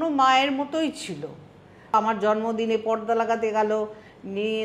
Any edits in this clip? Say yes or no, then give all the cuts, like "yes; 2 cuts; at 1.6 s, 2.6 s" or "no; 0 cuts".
yes; 1 cut; at 1.9 s